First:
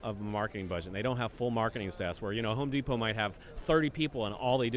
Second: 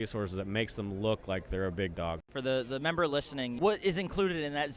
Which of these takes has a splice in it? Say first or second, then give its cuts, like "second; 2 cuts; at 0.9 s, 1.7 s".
second; 2 cuts; at 2.2 s, 3.5 s